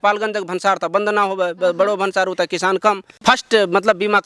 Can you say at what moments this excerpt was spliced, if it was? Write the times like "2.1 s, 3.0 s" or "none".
3.1 s